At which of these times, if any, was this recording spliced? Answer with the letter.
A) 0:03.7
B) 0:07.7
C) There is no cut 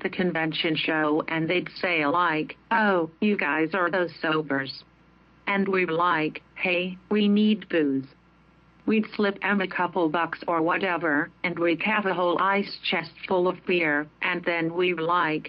A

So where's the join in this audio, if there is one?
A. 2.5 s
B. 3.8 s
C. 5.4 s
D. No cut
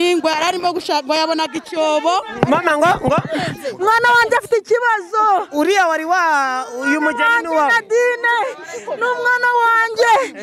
A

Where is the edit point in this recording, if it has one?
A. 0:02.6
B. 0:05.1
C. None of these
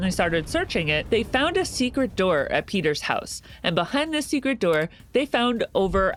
C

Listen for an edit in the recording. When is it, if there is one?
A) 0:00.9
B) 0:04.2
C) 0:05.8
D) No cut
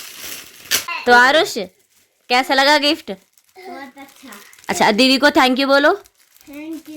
A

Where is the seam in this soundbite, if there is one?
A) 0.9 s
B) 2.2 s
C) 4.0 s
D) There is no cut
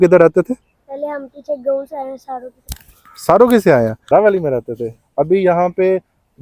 C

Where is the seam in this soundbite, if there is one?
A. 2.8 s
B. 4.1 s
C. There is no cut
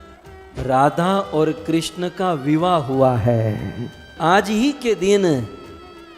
B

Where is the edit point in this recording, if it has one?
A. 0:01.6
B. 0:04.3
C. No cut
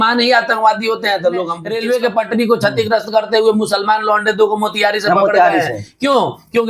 A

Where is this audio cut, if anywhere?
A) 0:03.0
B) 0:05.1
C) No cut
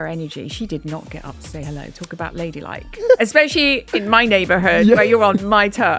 A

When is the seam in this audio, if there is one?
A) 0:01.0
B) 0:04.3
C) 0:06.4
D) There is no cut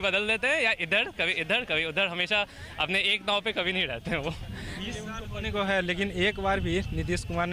D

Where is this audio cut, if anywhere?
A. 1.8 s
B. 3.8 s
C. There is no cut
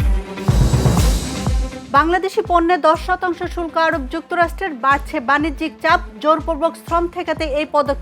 A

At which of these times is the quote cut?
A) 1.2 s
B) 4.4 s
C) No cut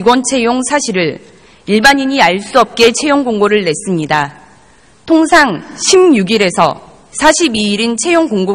B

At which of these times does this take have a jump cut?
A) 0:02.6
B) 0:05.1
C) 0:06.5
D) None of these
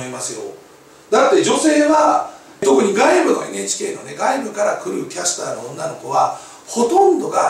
A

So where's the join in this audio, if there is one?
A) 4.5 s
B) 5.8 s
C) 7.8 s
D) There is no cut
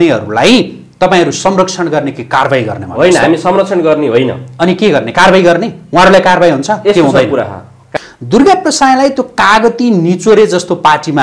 C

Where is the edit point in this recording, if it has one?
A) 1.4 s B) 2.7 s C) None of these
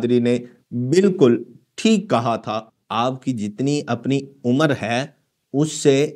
B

